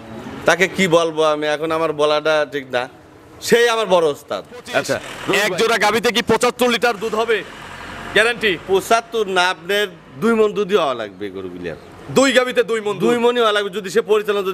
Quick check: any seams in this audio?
yes; 1 cut; at 5.1 s

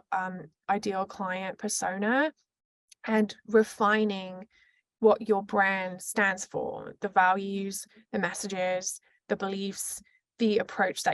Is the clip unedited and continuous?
yes; 0 cuts

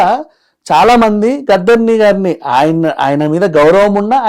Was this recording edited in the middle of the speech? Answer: no; 0 cuts

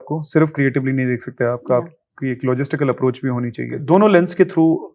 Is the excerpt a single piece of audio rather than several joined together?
no; 1 cut; at 3.7 s

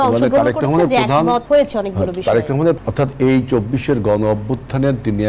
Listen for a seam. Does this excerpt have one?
yes; 2 cuts; at 1.4 s, 2.8 s

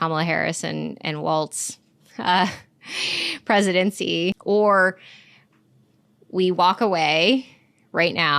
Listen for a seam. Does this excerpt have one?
yes; 1 cut; at 4.4 s

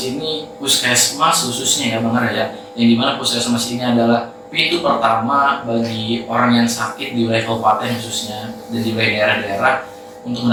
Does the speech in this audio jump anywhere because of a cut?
no; 0 cuts

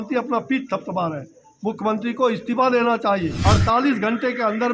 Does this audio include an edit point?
yes; 1 cut; at 3.3 s

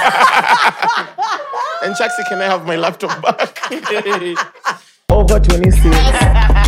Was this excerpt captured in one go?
no; 1 cut; at 5.0 s

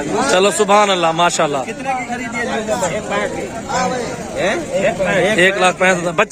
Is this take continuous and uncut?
yes; 0 cuts

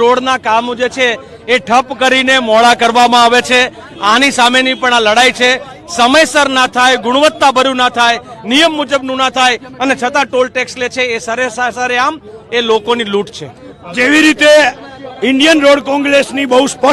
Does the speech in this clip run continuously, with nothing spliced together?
yes; 0 cuts

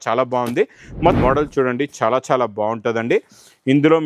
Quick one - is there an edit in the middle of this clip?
yes; 1 cut; at 1.2 s

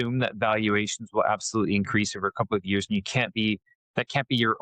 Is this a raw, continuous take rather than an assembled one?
yes; 0 cuts

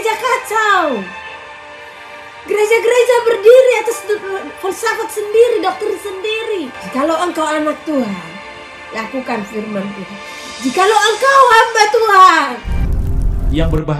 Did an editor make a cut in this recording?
yes; 2 cuts; at 6.8 s, 12.7 s

